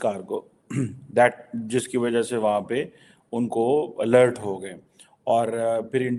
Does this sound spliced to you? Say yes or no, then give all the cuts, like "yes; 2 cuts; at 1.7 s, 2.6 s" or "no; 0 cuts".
no; 0 cuts